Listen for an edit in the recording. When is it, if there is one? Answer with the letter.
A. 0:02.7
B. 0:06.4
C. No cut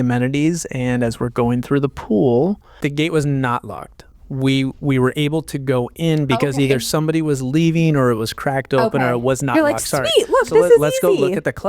A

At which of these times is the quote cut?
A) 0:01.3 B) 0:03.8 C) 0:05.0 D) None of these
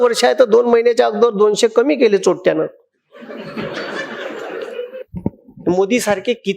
C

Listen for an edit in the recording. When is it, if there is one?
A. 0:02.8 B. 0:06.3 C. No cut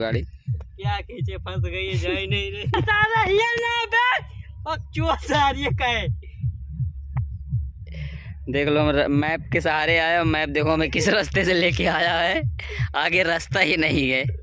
A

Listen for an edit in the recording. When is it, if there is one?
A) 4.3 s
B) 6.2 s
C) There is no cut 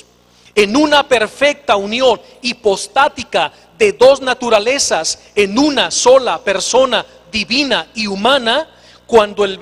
B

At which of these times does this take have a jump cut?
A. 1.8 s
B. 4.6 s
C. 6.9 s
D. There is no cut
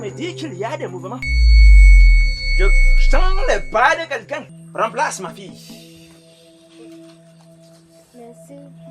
B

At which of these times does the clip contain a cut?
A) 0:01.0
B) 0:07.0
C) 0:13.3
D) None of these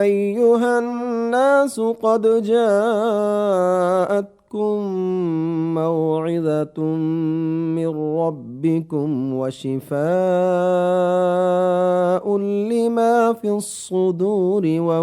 A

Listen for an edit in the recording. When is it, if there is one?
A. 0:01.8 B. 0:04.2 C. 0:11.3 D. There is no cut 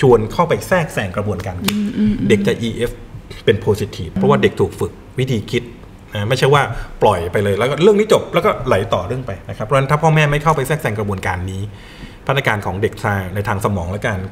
B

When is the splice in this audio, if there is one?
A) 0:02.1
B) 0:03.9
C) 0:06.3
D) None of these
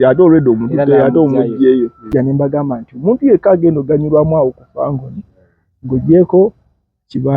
A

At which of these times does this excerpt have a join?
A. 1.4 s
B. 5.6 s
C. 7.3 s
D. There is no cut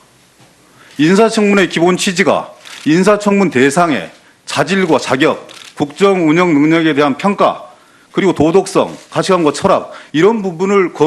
A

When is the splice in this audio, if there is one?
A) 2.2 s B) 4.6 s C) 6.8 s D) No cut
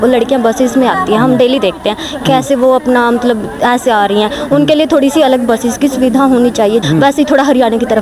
C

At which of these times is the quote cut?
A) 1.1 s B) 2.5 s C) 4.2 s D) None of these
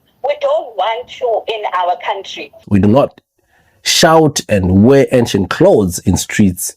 B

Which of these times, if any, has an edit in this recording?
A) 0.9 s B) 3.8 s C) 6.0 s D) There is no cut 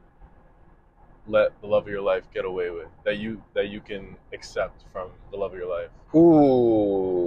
C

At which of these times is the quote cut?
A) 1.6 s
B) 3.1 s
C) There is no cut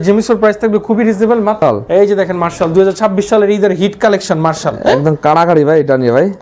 A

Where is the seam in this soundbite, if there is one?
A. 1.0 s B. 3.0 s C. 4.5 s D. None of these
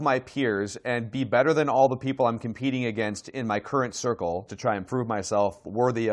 C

